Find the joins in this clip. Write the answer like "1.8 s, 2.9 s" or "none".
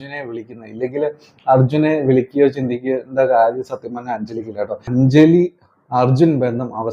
4.8 s